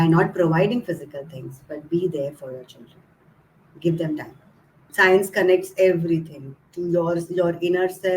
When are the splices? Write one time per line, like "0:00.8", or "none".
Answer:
0:04.9